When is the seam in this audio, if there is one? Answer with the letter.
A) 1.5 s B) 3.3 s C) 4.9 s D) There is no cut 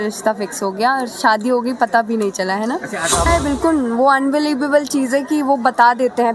B